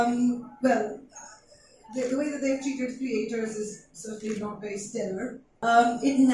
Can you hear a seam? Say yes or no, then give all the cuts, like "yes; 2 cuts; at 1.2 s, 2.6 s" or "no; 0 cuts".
yes; 1 cut; at 5.4 s